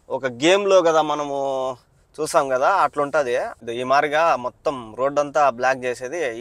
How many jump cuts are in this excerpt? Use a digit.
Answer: 1